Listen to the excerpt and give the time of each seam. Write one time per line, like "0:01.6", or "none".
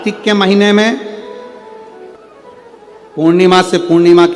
0:02.2